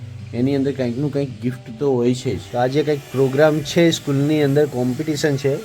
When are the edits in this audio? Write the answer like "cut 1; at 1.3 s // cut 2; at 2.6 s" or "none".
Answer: cut 1; at 2.4 s

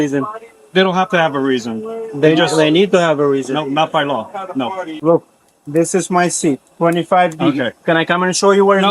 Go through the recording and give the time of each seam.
cut 1; at 4.9 s

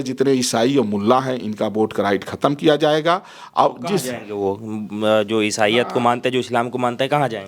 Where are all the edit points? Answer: none

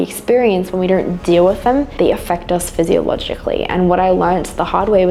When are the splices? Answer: none

